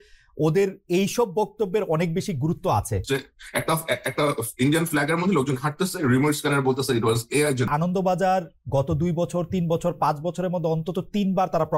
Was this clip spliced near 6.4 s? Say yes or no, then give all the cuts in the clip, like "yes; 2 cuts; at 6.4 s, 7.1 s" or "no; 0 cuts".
no; 2 cuts; at 3.0 s, 7.7 s